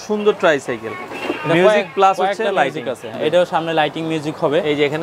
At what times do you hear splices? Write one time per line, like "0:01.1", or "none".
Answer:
0:03.2